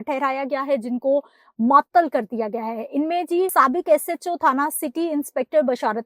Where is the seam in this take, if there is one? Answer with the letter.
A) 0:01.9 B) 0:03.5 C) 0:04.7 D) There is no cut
B